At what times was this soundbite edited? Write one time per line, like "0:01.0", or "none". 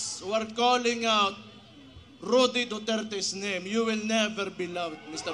none